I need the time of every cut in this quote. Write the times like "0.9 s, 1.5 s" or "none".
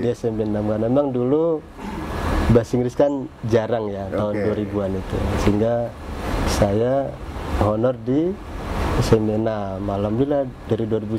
none